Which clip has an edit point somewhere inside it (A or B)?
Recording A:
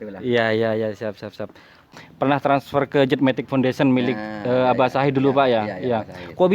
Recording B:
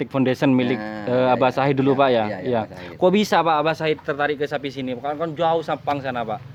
A